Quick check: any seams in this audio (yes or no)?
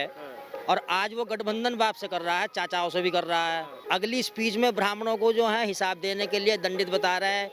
yes